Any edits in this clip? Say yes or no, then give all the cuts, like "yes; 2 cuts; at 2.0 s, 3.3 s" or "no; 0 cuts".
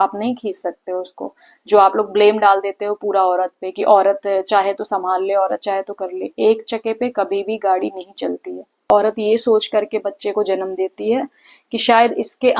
yes; 1 cut; at 8.8 s